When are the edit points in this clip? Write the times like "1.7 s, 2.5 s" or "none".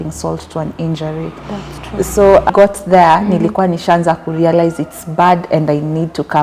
2.5 s